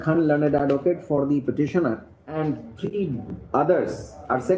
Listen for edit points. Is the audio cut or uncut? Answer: cut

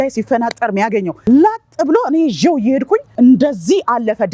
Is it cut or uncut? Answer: cut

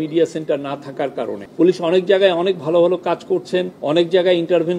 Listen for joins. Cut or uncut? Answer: cut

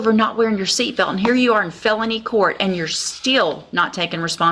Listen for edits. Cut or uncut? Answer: uncut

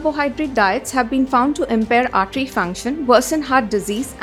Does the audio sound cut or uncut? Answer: uncut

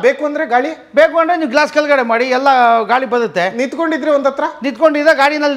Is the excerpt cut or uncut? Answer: uncut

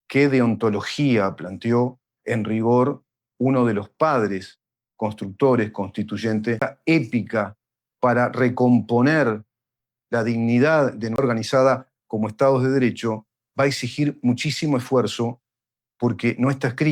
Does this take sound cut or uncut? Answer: cut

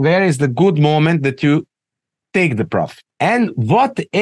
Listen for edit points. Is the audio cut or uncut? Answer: cut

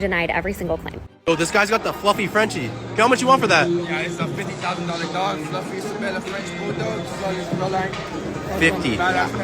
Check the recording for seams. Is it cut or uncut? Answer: cut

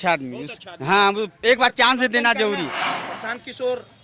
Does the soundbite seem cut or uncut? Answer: cut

